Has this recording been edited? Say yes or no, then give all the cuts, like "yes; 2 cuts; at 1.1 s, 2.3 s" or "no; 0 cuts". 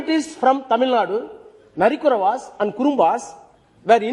no; 0 cuts